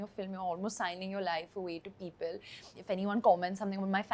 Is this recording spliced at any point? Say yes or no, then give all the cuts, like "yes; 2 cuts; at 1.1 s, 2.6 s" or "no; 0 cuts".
yes; 1 cut; at 2.7 s